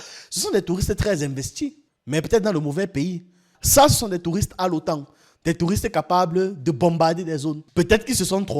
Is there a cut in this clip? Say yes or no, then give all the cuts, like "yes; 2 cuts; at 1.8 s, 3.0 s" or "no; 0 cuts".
yes; 1 cut; at 3.5 s